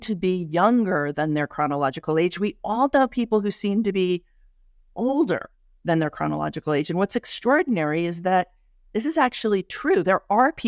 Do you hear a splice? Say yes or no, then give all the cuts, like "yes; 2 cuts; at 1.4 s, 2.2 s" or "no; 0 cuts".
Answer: no; 0 cuts